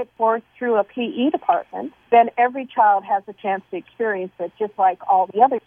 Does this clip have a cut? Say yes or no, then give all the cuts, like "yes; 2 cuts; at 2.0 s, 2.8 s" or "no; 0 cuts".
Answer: no; 0 cuts